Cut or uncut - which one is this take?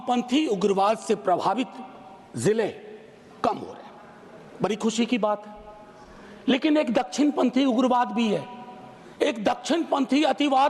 uncut